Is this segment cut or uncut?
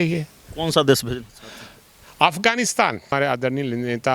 cut